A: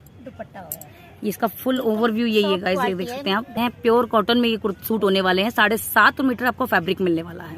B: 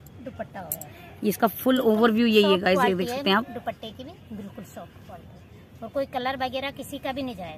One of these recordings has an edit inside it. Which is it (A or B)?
A